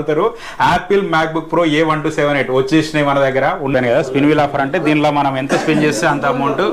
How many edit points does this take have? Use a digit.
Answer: 1